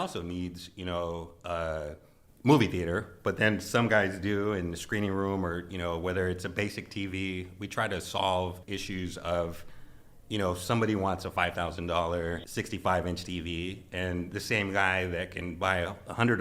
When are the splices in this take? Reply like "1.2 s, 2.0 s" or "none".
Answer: 8.7 s, 12.4 s